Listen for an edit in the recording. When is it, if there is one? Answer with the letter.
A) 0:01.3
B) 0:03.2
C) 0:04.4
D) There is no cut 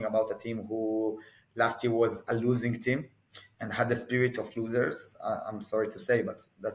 D